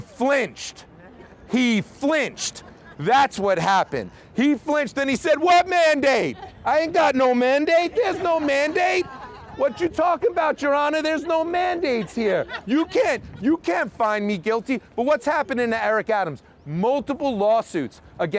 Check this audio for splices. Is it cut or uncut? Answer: uncut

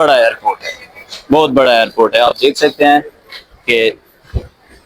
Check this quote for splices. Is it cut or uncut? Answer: uncut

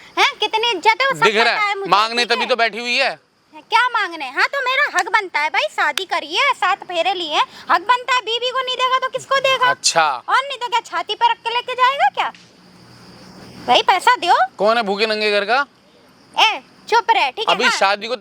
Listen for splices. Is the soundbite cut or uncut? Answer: uncut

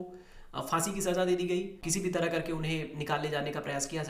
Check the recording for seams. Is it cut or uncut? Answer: cut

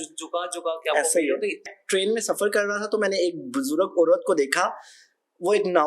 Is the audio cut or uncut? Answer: cut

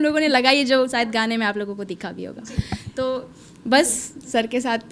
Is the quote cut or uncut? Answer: uncut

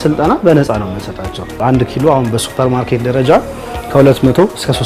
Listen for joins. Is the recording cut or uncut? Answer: cut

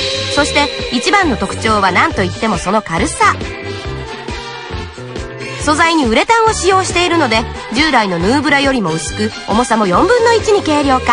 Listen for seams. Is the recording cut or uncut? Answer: cut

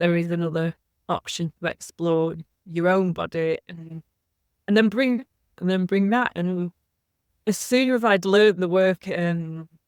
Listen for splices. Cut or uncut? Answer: uncut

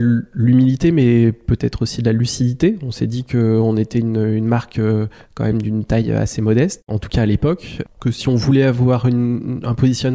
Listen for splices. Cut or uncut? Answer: uncut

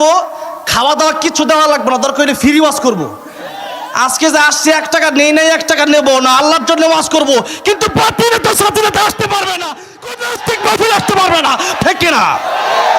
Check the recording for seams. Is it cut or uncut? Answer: cut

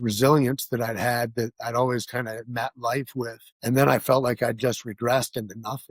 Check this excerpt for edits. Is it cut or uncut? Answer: cut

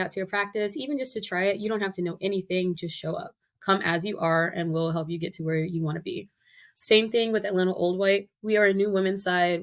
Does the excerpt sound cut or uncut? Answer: uncut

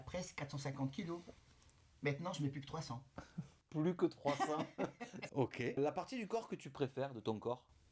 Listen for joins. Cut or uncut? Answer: uncut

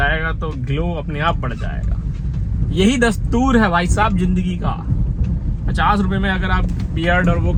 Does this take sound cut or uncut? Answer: uncut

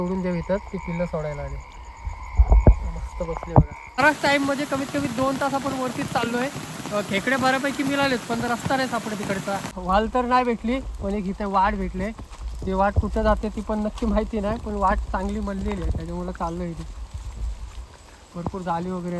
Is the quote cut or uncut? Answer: cut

